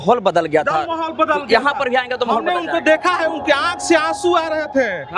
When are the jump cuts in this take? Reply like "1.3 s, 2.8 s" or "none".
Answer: none